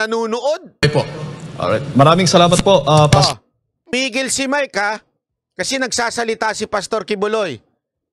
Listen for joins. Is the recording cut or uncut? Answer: cut